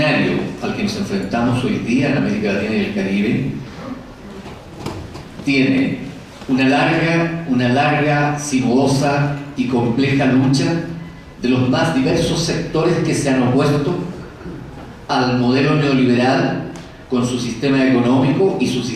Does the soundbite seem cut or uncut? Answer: cut